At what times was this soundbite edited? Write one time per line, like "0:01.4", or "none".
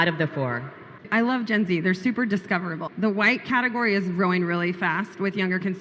0:01.1
0:02.8